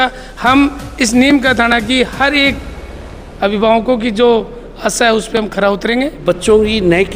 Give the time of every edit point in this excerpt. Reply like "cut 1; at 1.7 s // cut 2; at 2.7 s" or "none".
cut 1; at 6.2 s